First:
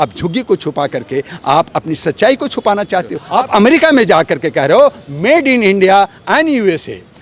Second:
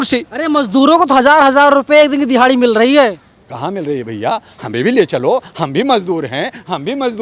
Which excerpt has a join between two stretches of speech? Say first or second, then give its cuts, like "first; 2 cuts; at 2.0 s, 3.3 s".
first; 1 cut; at 3.2 s